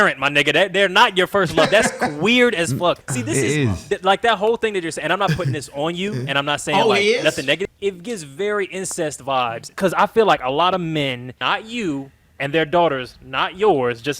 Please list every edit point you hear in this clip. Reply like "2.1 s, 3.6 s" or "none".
3.1 s, 7.6 s, 9.7 s, 11.3 s